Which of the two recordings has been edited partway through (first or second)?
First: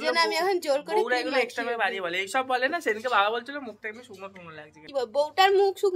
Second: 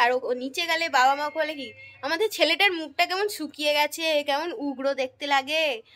first